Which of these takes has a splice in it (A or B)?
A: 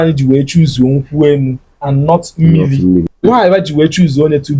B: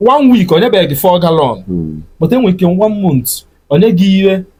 A